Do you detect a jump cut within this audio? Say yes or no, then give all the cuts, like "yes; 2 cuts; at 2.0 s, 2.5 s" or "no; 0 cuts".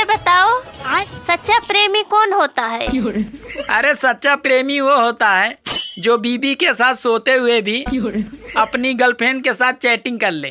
no; 0 cuts